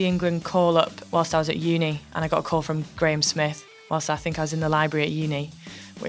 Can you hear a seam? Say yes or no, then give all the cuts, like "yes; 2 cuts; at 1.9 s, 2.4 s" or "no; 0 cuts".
yes; 1 cut; at 1.0 s